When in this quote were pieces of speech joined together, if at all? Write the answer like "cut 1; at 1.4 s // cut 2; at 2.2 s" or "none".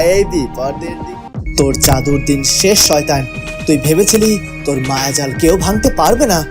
cut 1; at 0.9 s